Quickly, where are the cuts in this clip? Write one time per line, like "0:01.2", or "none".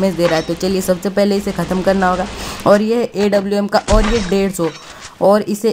none